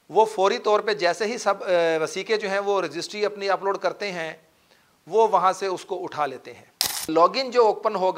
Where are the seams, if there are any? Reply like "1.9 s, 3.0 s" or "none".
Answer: 7.1 s

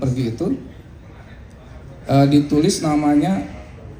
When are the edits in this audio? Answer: none

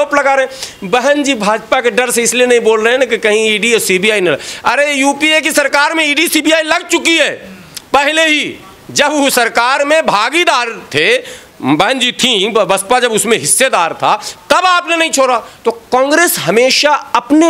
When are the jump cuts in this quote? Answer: none

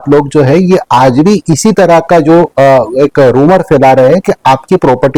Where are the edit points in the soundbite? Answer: none

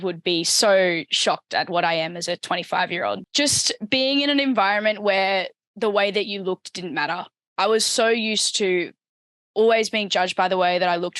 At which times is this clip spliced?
3.2 s

